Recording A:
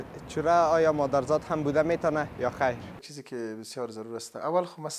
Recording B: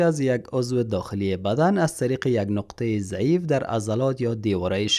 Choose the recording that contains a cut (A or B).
A